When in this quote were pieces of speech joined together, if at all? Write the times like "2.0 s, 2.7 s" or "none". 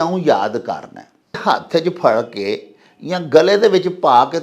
1.4 s